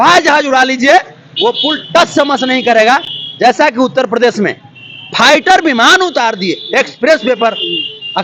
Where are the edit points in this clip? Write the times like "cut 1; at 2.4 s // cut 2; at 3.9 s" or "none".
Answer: none